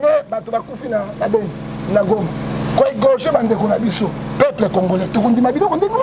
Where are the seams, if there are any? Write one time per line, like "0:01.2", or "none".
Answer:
none